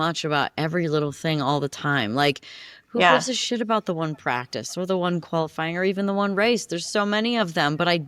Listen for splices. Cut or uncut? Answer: uncut